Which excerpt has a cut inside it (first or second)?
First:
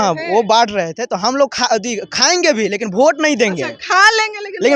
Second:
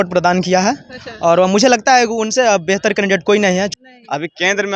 second